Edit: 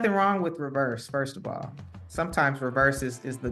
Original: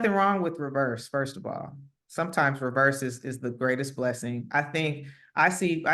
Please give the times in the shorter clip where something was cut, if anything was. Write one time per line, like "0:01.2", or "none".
none